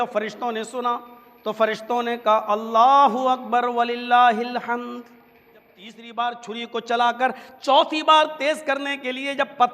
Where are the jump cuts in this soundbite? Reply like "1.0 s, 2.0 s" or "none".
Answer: 6.0 s